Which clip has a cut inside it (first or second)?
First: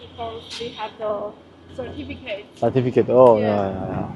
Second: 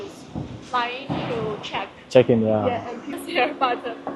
second